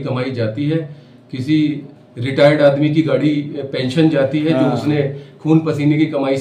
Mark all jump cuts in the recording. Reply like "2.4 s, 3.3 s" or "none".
none